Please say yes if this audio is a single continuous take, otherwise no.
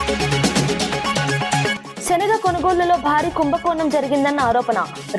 no